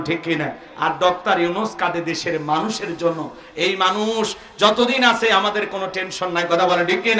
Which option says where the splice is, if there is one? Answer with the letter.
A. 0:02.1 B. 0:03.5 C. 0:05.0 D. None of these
D